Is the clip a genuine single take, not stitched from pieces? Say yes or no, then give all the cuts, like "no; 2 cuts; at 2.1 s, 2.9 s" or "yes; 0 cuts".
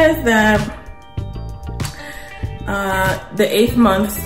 yes; 0 cuts